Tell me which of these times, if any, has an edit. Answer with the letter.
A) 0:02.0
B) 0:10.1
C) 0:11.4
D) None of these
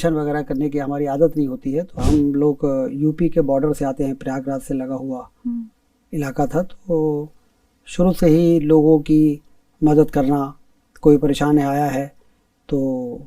A